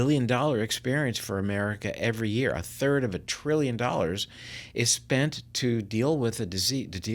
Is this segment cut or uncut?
uncut